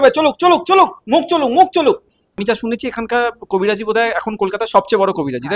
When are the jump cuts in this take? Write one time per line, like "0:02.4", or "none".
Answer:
0:02.4